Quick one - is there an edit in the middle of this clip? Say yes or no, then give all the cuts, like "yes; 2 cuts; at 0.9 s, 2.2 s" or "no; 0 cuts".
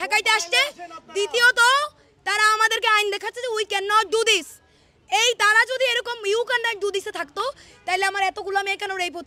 no; 0 cuts